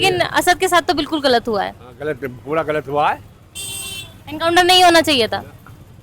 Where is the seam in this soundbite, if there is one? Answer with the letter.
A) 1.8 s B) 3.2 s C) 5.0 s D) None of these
D